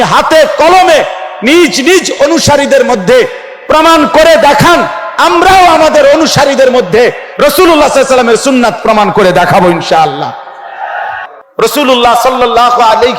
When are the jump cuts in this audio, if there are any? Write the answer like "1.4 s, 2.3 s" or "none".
11.3 s

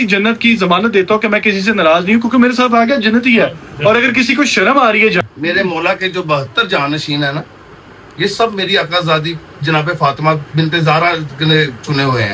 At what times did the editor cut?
5.2 s

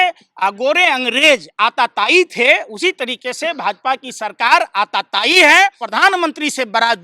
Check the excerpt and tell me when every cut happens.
5.8 s

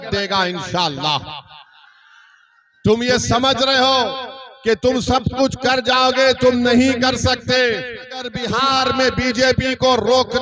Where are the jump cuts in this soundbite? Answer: none

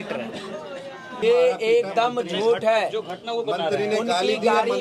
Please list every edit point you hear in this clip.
1.2 s

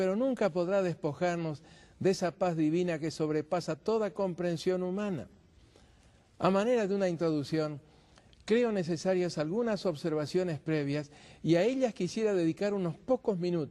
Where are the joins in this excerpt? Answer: 11.8 s

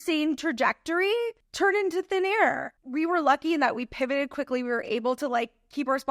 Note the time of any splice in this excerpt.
2.7 s

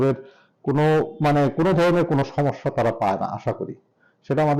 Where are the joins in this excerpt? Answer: none

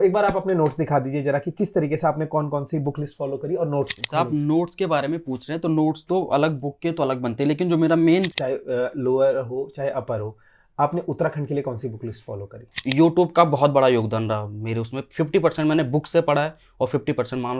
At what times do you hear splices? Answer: 8.3 s, 12.8 s

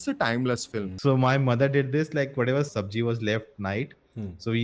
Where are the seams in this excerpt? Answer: 0.9 s, 2.7 s

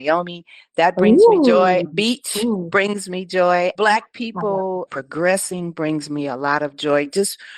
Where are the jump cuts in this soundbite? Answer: 1.9 s, 3.7 s

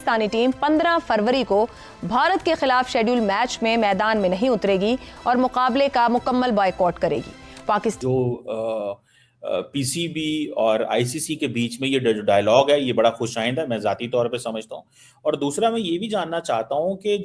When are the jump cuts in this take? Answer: 8.0 s

